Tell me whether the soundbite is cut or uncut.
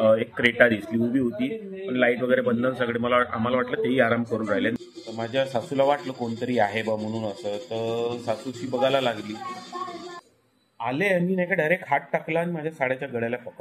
cut